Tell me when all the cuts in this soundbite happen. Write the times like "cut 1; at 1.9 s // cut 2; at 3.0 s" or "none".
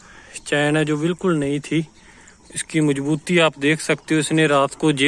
none